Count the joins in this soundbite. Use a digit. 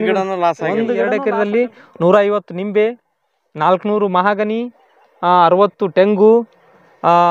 1